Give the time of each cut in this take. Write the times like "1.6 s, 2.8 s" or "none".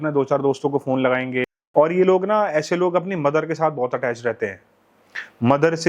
1.6 s